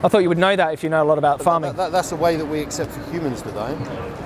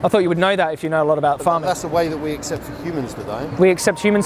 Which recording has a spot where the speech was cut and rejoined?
second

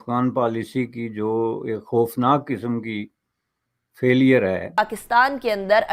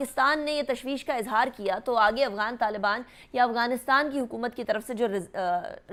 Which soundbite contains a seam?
first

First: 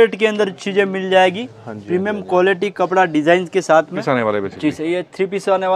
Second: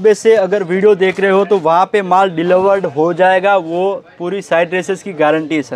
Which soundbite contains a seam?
first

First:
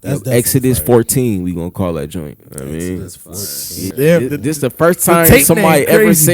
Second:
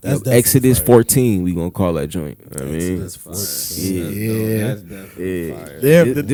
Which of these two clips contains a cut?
first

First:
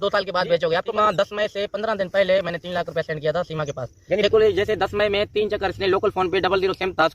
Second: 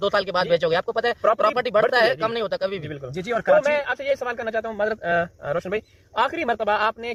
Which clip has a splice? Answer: first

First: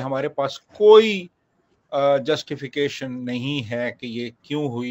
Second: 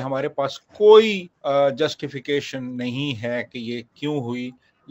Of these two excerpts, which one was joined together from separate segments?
second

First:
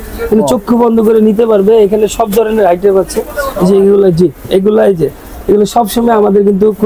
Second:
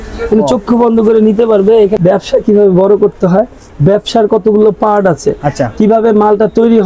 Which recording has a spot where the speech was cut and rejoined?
second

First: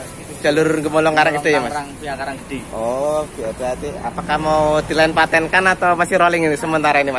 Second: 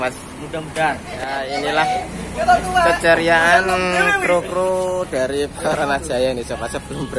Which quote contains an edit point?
second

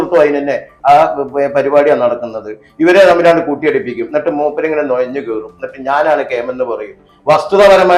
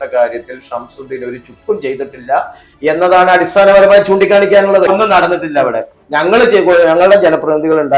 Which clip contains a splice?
second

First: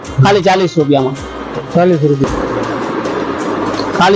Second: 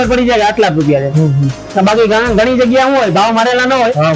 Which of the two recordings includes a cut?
first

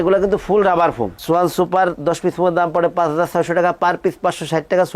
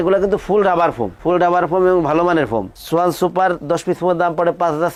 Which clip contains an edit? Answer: first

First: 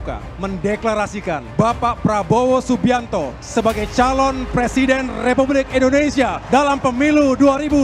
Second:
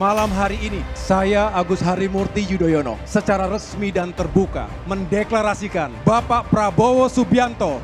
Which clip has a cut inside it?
second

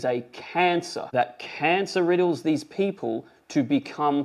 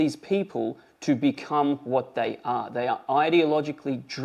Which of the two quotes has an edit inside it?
first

